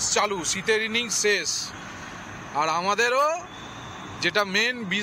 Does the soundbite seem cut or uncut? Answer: uncut